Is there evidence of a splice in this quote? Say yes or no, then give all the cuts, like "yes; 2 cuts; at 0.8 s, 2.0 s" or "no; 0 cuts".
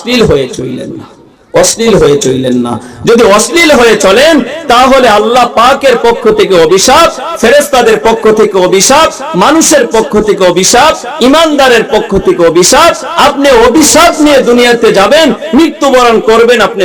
no; 0 cuts